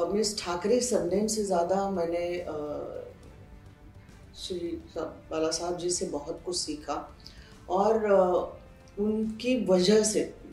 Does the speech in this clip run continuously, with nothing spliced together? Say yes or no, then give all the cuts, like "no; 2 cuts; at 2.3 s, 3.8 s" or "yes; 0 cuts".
yes; 0 cuts